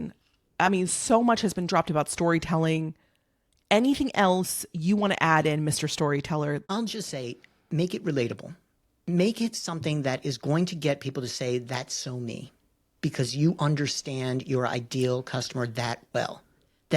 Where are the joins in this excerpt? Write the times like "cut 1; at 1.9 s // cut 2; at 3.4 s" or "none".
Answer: cut 1; at 6.6 s